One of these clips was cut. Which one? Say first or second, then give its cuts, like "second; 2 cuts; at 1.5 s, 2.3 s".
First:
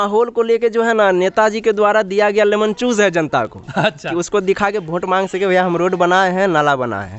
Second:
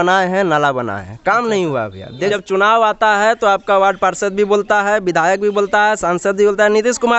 second; 1 cut; at 2.3 s